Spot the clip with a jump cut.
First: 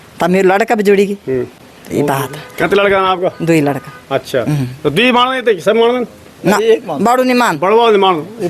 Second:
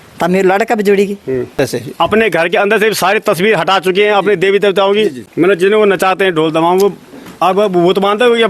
second; 2 cuts; at 1.6 s, 5.2 s

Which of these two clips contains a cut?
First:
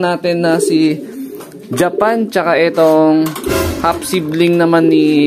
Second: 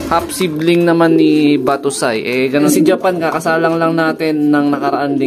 second; 1 cut; at 2.7 s

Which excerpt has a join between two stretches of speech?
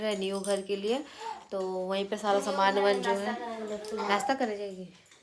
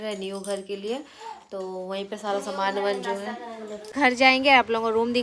second; 1 cut; at 3.9 s

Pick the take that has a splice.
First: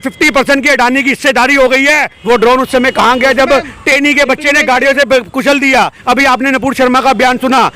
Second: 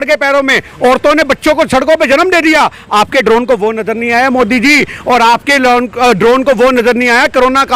first; 2 cuts; at 2.1 s, 6.0 s

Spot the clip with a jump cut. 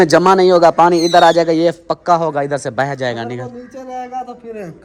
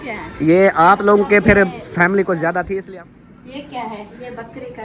second; 1 cut; at 2.8 s

